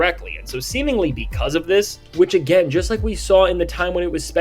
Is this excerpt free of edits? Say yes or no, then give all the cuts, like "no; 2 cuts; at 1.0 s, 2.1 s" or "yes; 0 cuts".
yes; 0 cuts